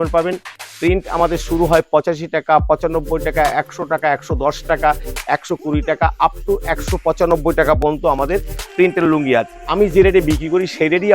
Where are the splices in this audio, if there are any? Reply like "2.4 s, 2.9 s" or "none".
9.6 s